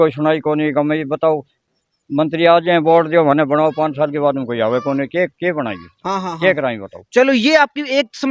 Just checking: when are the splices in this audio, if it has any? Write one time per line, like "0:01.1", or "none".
none